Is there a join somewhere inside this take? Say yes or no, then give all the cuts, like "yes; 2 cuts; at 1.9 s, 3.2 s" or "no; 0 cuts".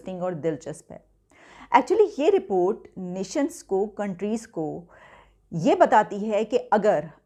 no; 0 cuts